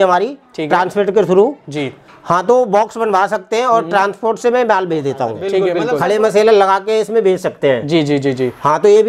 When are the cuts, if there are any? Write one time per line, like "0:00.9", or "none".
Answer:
0:05.7